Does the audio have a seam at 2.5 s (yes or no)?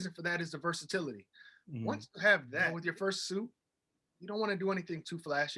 yes